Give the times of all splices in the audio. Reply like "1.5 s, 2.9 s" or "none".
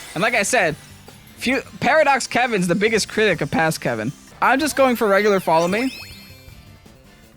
4.2 s

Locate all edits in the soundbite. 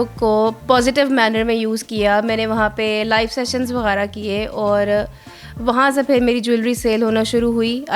none

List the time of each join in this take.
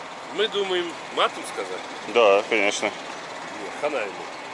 1.0 s

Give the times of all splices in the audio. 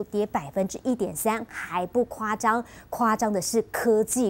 3.2 s

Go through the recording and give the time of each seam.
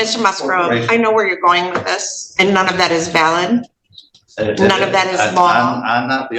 none

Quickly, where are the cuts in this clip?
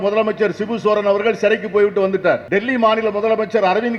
2.4 s

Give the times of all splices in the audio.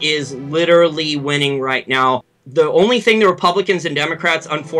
2.4 s

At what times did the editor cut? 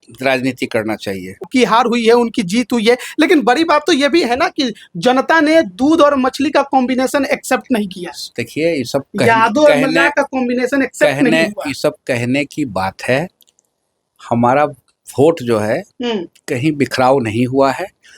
1.5 s

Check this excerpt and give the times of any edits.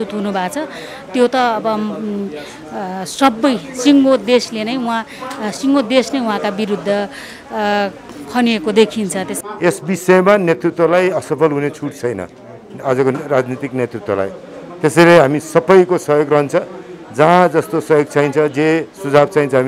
9.4 s

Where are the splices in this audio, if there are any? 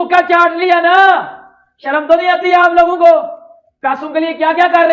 none

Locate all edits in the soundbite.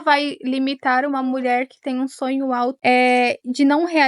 2.8 s

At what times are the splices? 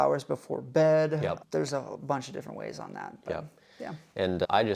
none

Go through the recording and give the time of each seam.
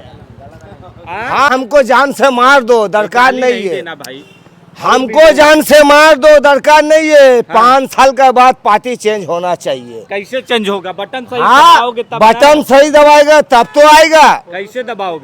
1.5 s

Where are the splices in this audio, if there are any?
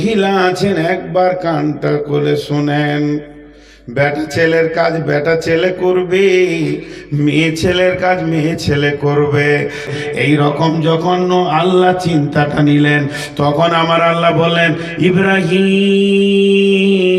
10.0 s

